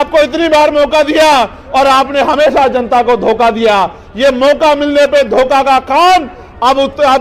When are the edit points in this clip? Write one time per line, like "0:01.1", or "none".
none